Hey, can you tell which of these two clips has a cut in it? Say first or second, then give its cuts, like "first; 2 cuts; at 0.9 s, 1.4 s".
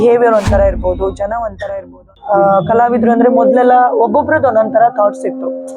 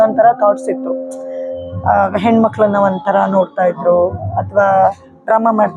first; 1 cut; at 2.1 s